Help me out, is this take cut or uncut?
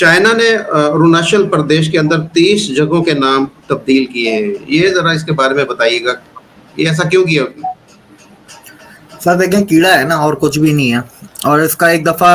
uncut